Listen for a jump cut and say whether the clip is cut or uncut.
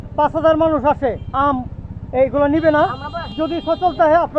cut